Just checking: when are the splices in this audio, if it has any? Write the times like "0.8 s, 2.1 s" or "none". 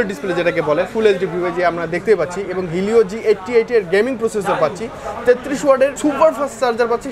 none